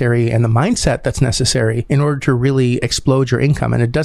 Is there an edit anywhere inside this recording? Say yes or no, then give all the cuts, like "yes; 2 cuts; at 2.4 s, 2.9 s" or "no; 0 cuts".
yes; 1 cut; at 1.8 s